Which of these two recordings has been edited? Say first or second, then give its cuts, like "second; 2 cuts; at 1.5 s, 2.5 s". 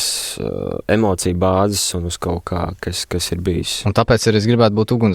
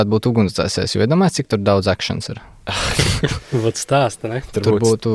first; 1 cut; at 3.7 s